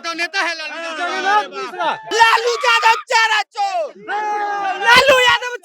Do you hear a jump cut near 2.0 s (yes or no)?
yes